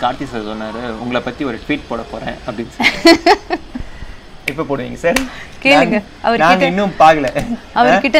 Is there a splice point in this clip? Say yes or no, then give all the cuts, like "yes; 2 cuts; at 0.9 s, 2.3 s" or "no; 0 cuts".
no; 0 cuts